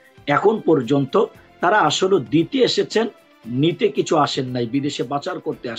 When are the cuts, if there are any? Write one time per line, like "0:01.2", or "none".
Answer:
none